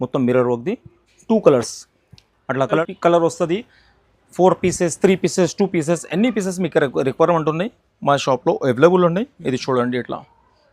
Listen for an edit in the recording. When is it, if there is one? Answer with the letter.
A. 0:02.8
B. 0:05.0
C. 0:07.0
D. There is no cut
A